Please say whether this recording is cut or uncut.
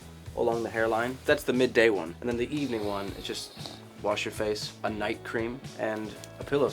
cut